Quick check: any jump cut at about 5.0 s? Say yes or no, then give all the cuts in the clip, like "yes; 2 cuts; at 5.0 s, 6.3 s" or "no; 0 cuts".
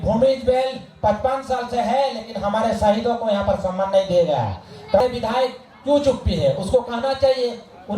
yes; 1 cut; at 5.0 s